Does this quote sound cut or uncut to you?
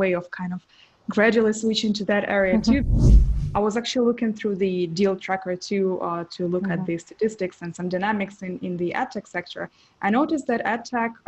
uncut